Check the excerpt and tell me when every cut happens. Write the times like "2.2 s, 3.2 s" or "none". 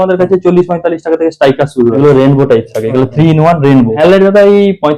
2.0 s, 3.9 s

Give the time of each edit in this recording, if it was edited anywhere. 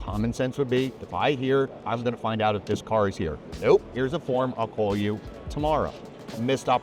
none

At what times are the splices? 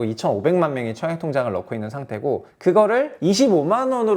2.5 s, 3.1 s

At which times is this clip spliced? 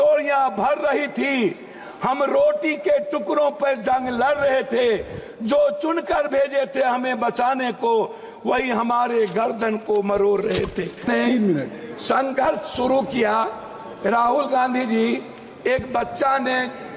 11.1 s

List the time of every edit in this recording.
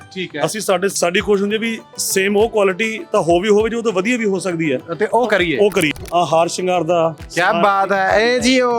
0.9 s, 5.9 s

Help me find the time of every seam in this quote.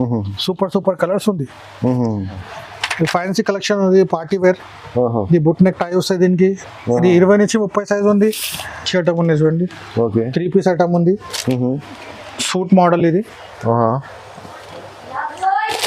2.4 s, 8.9 s

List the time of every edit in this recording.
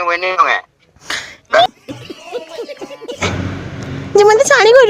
1.7 s, 3.2 s

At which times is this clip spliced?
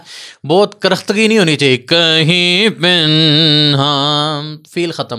none

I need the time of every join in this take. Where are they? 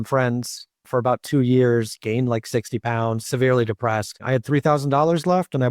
3.2 s, 4.2 s

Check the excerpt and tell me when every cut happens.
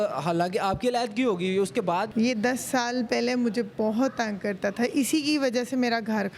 2.1 s

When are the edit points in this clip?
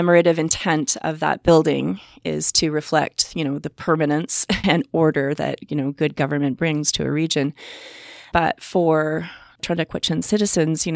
9.6 s

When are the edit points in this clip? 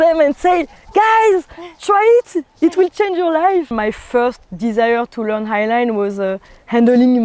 3.7 s

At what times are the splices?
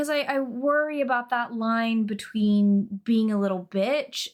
none

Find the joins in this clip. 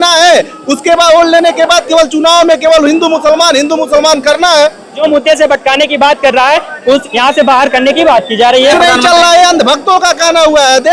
5.0 s, 7.1 s, 8.7 s

